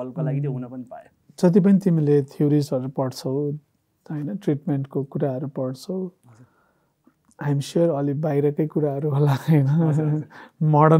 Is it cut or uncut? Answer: cut